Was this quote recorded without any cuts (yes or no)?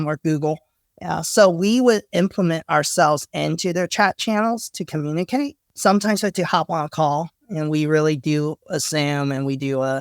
no